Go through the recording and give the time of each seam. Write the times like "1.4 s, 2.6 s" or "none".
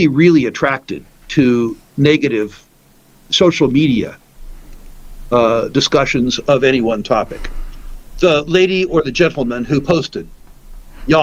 none